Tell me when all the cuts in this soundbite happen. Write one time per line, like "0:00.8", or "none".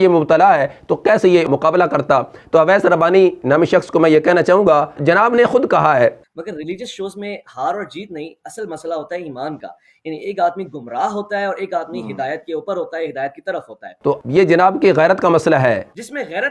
0:02.3
0:06.2
0:13.8